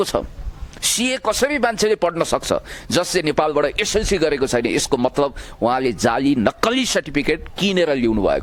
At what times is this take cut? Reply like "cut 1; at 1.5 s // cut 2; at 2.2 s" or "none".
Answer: none